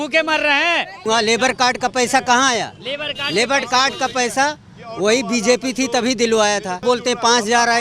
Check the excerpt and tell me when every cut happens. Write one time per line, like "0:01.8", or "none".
0:01.0
0:06.8